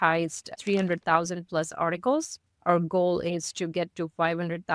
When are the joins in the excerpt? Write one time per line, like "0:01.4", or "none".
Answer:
none